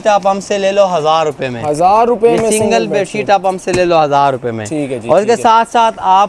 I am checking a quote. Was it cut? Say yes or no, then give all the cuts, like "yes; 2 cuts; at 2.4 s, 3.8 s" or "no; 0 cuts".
no; 0 cuts